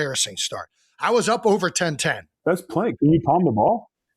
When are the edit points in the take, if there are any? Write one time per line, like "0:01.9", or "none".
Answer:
0:02.4